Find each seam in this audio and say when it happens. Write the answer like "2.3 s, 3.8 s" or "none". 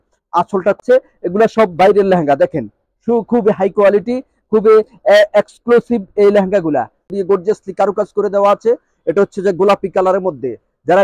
0.8 s, 7.1 s